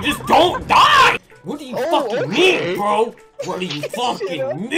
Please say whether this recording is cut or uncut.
uncut